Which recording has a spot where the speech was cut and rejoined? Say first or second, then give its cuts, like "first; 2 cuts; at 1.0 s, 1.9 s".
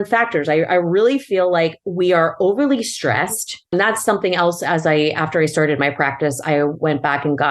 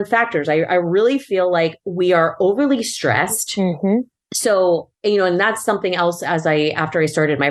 first; 1 cut; at 3.7 s